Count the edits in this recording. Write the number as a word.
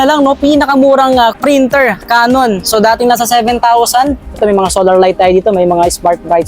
two